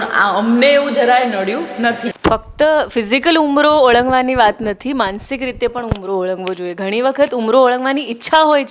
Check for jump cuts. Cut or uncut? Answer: cut